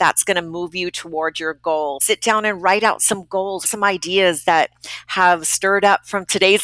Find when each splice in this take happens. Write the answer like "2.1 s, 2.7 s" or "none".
2.0 s, 3.7 s